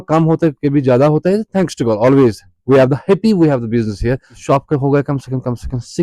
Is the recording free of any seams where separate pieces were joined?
no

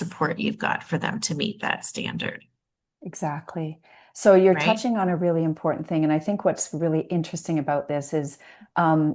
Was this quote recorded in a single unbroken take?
yes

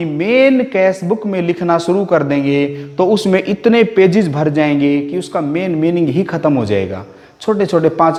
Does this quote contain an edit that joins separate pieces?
no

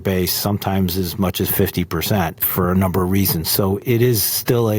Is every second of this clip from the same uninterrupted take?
no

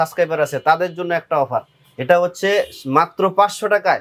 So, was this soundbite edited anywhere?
no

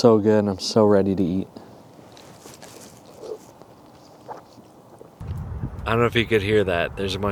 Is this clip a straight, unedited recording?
yes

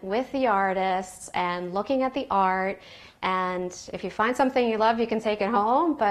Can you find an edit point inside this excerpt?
no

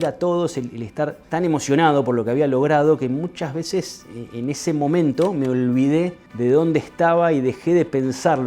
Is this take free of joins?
no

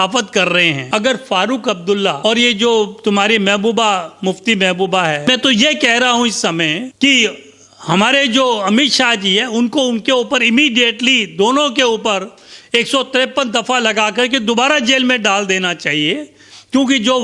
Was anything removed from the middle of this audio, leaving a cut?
yes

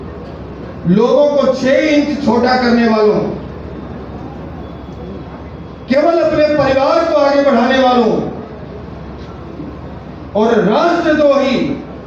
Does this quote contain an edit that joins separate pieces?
no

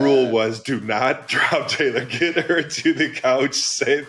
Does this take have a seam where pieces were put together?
no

